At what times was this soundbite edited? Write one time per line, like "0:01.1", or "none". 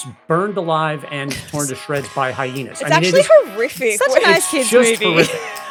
none